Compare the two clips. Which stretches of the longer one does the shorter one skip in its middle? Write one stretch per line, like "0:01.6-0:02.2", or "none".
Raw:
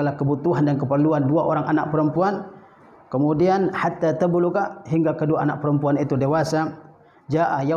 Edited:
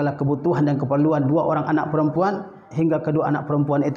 0:02.6-0:04.8